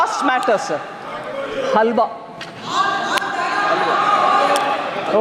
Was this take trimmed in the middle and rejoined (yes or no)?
no